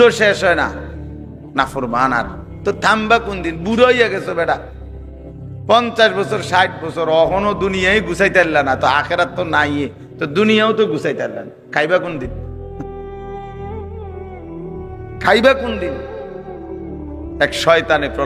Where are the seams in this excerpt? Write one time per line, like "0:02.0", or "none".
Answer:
none